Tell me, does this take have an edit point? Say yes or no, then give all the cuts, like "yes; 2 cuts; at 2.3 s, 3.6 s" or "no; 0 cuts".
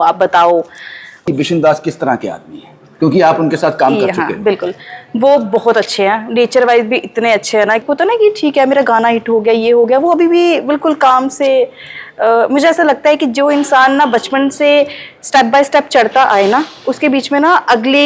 yes; 2 cuts; at 1.2 s, 7.8 s